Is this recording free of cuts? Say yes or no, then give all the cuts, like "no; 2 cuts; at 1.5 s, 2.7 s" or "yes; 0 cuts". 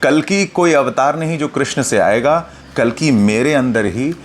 yes; 0 cuts